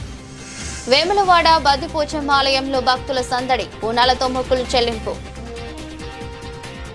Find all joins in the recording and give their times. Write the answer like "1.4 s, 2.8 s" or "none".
none